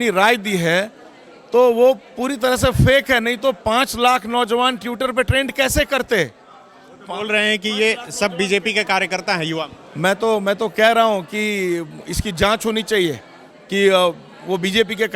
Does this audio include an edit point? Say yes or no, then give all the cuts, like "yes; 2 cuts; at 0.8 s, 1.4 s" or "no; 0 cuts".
no; 0 cuts